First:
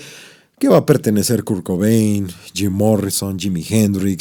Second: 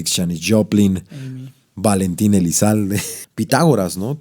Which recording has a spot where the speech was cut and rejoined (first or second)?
second